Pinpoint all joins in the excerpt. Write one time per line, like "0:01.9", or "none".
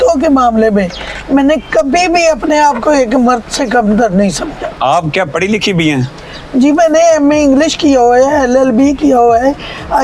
0:04.6